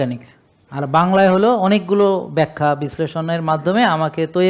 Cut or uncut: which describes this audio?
uncut